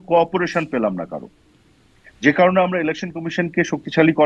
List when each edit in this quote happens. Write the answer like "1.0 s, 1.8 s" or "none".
none